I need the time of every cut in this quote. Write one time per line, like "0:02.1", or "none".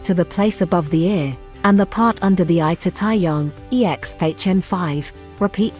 none